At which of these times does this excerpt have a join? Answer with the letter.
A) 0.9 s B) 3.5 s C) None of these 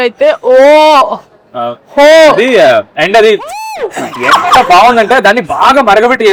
C